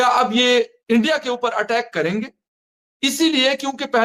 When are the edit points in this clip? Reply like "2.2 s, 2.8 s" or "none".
none

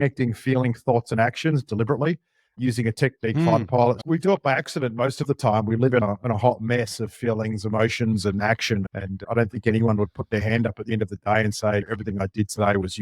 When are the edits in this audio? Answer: 4.0 s, 6.0 s

